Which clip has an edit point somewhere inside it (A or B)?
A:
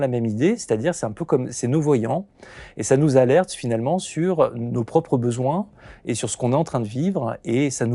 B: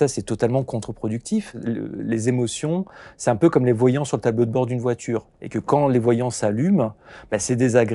B